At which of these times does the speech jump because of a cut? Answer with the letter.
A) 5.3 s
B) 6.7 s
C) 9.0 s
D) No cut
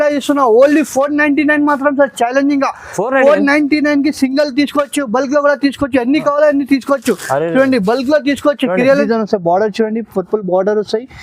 C